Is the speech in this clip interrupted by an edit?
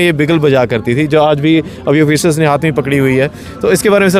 no; 0 cuts

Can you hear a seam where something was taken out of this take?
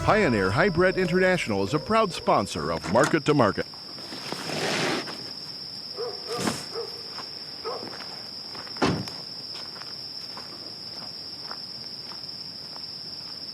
yes; 1 cut; at 3.6 s

